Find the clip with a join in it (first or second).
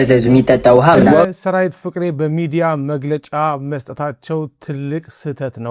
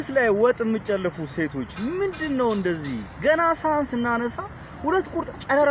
first